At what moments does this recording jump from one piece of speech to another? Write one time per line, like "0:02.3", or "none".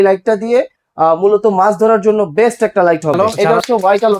0:03.2